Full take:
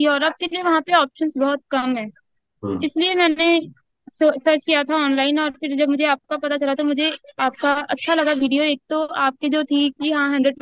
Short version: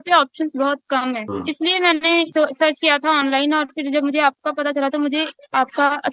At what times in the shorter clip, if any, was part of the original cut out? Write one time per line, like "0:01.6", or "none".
0:01.3
0:02.3

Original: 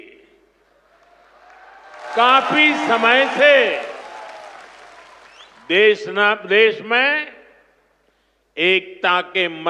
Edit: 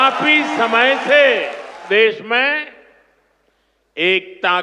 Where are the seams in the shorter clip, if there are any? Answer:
0:01.8

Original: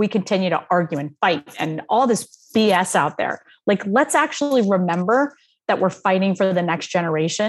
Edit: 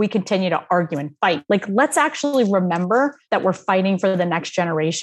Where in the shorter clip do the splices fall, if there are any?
0:01.4
0:03.2

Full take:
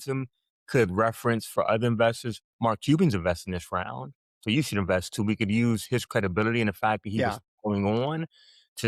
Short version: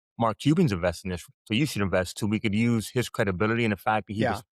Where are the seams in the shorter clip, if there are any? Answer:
0:01.2

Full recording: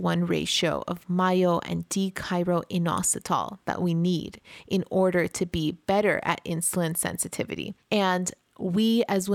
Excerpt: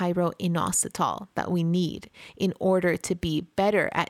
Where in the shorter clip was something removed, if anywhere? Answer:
none

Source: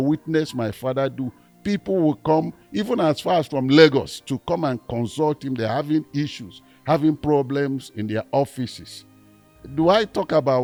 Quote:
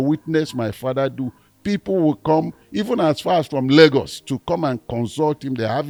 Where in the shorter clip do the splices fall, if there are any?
none

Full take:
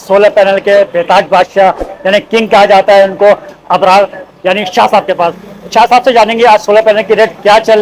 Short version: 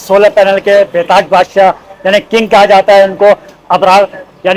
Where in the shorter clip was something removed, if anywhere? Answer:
none

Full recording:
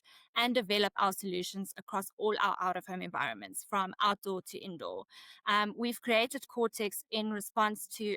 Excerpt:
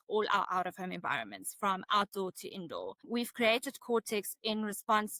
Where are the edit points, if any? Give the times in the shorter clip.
0:03.1

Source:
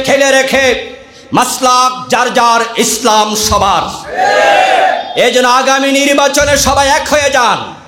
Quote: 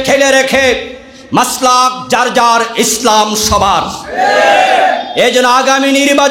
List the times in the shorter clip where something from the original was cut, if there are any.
none

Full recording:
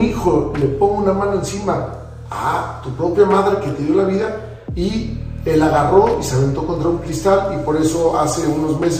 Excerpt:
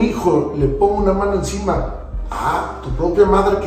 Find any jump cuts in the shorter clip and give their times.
none

